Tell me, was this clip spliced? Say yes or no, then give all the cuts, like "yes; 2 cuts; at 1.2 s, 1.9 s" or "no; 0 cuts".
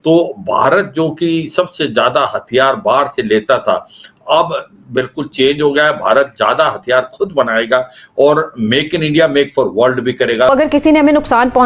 yes; 1 cut; at 10.5 s